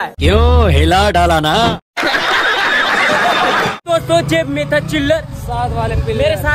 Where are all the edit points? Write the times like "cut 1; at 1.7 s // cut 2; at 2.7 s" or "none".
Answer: cut 1; at 3.8 s